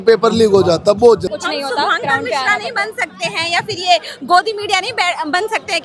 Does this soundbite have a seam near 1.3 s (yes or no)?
yes